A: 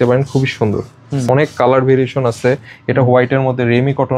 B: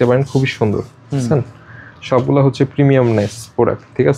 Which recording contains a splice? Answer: A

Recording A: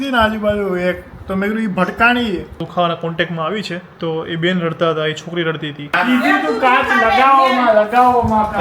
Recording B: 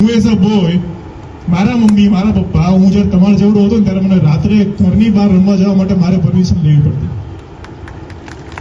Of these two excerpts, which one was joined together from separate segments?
A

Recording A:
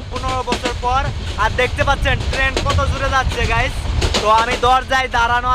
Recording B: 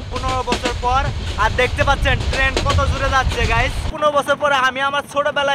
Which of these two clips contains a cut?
B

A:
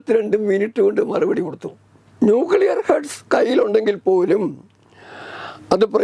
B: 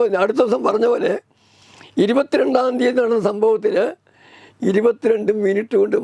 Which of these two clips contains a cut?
A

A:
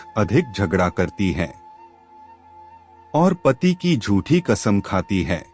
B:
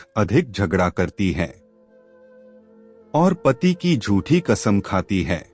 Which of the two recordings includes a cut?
B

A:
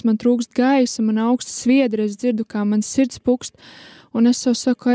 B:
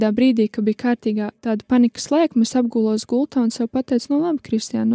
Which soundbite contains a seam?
B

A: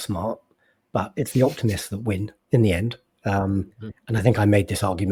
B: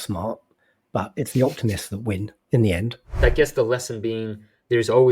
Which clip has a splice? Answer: B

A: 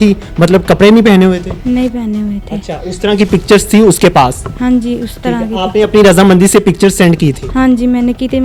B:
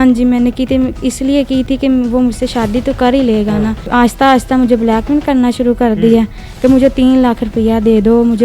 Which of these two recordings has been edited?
B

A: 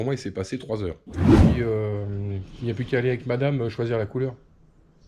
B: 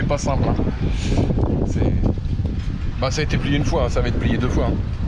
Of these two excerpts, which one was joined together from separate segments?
A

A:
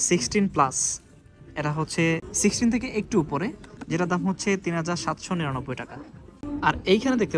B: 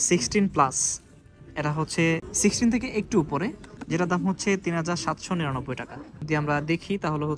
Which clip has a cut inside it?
B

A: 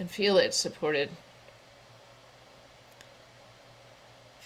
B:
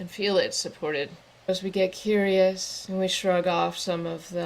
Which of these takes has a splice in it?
B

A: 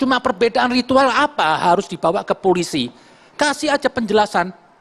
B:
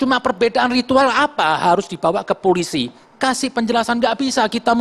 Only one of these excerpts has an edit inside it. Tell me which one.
B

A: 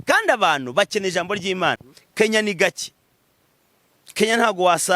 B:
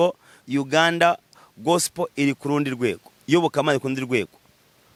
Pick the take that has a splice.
A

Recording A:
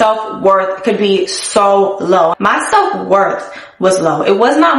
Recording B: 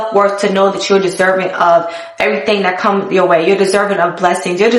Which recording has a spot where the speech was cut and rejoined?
A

